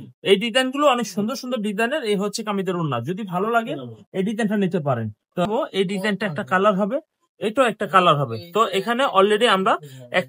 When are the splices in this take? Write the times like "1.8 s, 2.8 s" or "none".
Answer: 5.5 s

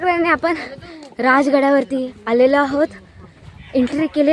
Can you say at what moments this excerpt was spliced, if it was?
none

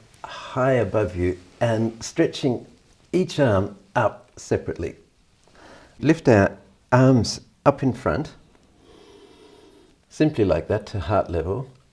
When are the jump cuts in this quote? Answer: 6.0 s

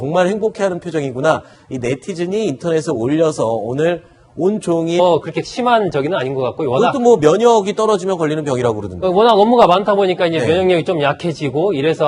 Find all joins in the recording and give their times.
none

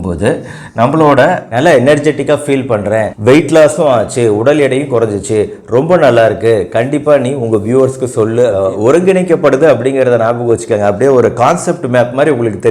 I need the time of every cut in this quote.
1.4 s, 8.5 s

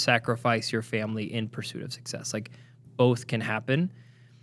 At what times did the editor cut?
none

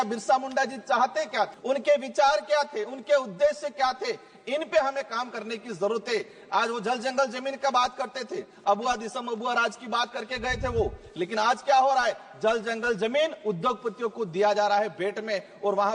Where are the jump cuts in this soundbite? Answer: none

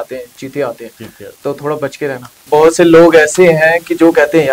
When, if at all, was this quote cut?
2.4 s

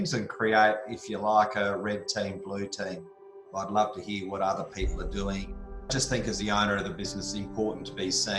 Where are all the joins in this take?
3.5 s, 5.9 s

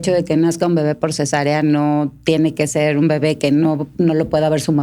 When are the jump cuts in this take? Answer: none

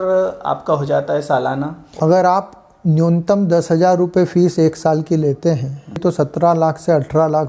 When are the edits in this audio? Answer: 1.9 s, 6.0 s

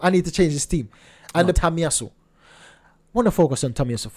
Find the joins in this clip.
1.6 s

